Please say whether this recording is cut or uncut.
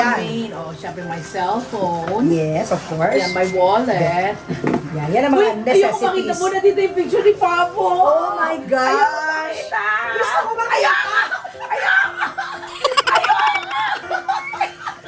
uncut